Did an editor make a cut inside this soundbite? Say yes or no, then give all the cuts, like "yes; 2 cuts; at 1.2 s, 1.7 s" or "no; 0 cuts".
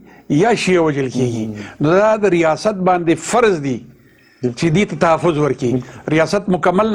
no; 0 cuts